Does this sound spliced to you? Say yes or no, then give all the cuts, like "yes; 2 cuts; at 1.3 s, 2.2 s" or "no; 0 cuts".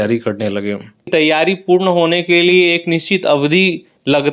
yes; 1 cut; at 1.1 s